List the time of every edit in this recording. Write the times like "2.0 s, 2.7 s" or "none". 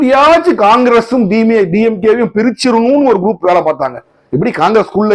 none

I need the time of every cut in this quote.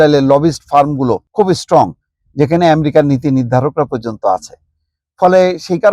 1.3 s

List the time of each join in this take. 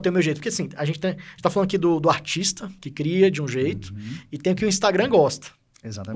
none

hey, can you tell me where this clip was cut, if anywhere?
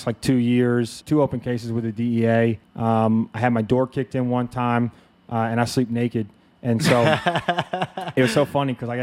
1.0 s, 2.7 s

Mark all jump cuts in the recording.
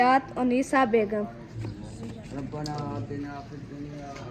1.6 s

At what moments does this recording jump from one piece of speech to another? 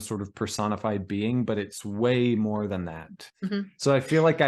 3.2 s

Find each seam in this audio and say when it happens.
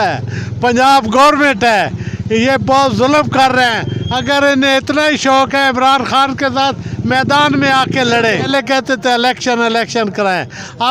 8.5 s

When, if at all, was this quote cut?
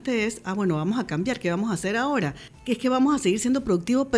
2.5 s

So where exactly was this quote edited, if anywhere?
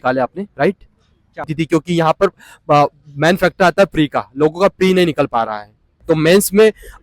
1.5 s, 5.9 s

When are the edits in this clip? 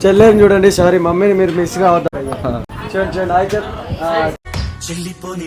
2.1 s

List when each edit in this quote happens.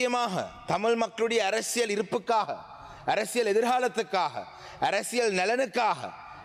none

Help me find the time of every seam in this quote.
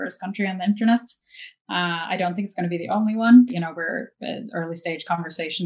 3.5 s

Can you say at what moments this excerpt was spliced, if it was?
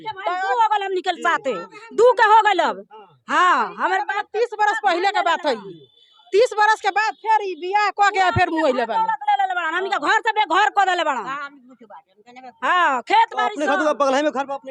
none

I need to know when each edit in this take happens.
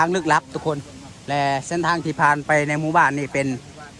none

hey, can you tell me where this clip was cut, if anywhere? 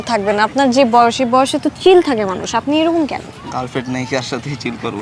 none

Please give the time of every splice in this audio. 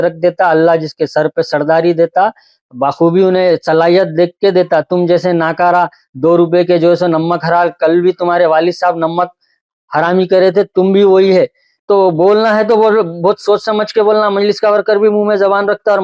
11.7 s

